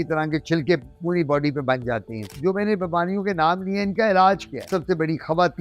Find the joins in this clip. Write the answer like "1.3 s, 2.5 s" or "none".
2.3 s, 4.7 s